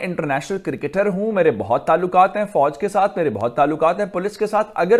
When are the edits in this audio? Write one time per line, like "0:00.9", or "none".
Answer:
none